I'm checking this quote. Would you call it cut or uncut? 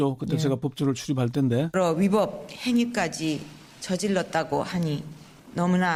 uncut